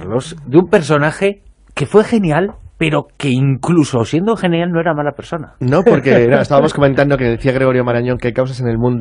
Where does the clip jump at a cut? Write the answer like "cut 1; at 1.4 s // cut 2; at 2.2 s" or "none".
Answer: cut 1; at 4.2 s

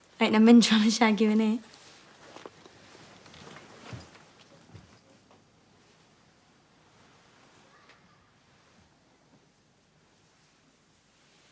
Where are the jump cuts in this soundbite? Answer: cut 1; at 3.4 s

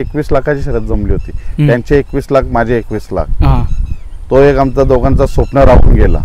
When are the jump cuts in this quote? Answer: none

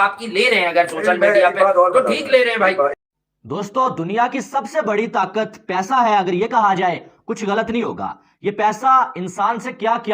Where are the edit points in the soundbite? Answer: cut 1; at 3.0 s

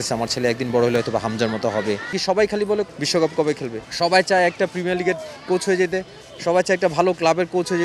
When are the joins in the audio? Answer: cut 1; at 2.2 s // cut 2; at 2.9 s // cut 3; at 3.8 s

